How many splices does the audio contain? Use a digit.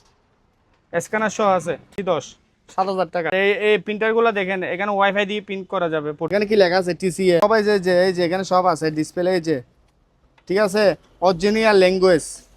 4